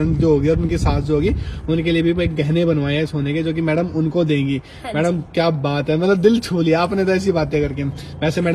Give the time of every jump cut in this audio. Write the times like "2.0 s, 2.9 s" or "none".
none